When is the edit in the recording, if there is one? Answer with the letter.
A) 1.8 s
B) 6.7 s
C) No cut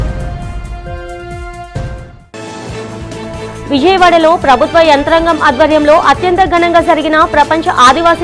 A